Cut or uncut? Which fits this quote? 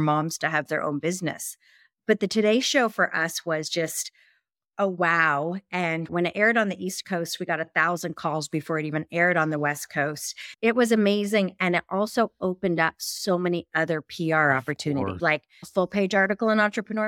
cut